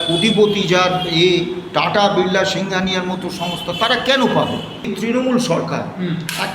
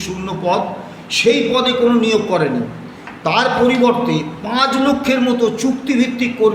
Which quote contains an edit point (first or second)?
first